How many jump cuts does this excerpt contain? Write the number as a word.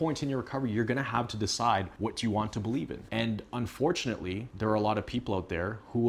three